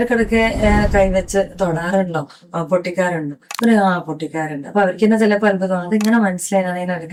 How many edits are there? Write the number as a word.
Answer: zero